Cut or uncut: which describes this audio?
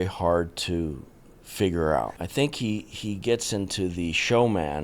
cut